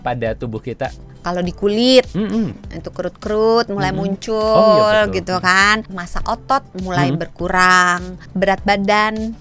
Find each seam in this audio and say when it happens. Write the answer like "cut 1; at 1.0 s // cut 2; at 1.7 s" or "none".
cut 1; at 1.1 s // cut 2; at 6.0 s // cut 3; at 8.2 s